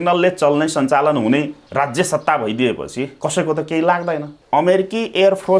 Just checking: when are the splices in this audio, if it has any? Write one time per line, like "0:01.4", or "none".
0:01.6
0:03.1
0:04.3